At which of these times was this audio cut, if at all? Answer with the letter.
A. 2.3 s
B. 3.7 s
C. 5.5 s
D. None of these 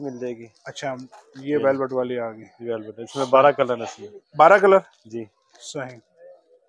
D